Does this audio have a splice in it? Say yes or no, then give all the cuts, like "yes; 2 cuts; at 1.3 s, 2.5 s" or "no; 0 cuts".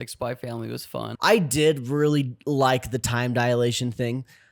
yes; 1 cut; at 1.1 s